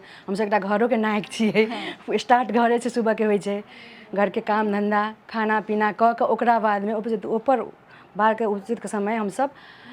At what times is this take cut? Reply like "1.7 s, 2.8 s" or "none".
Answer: none